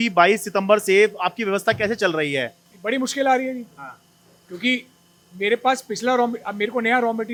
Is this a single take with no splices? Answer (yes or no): yes